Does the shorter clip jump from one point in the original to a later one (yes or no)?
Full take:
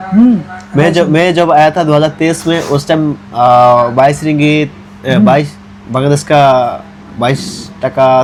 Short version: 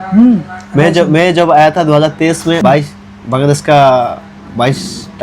yes